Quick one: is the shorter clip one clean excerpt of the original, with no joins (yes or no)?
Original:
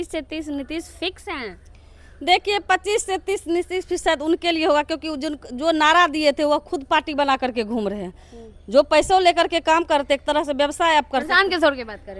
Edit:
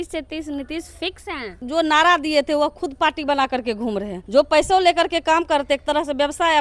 no